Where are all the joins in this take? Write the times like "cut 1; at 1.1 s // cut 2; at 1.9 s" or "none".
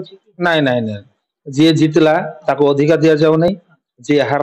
none